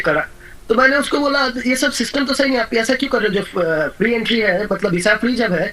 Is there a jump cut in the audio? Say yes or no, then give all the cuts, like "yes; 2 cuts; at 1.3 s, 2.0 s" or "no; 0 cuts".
no; 0 cuts